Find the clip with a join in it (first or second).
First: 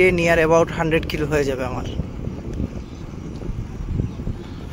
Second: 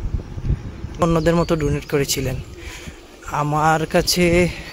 second